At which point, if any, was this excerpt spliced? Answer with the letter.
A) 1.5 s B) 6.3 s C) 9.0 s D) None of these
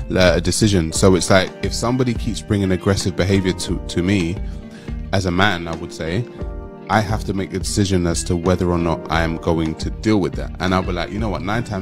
D